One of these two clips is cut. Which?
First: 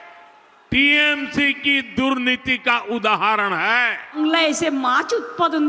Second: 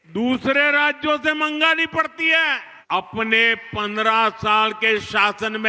first; 1 cut; at 4.2 s

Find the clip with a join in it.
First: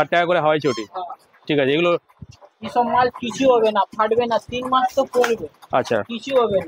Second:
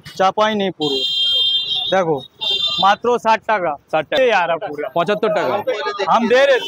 second; 1 cut; at 4.2 s

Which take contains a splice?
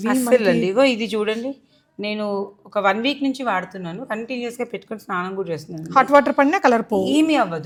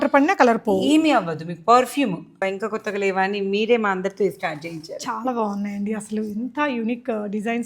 second; 1 cut; at 2.4 s

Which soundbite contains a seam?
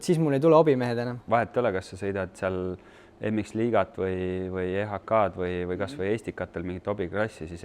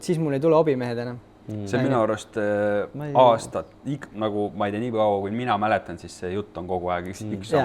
first; 1 cut; at 1.2 s

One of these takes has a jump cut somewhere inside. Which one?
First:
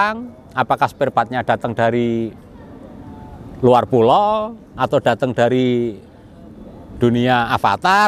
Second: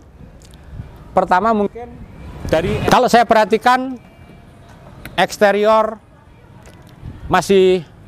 second; 1 cut; at 2.7 s

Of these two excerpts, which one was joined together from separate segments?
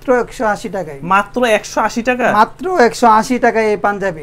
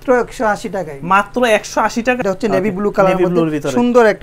second; 1 cut; at 2.2 s

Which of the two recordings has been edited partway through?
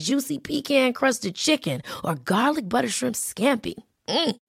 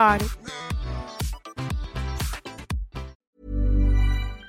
second; 1 cut; at 3.2 s

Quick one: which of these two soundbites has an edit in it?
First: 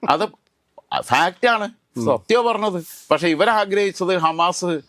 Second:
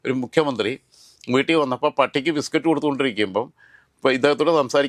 first; 1 cut; at 2.8 s

